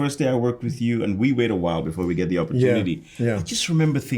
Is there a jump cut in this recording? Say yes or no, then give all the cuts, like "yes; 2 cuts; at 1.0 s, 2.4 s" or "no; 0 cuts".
no; 0 cuts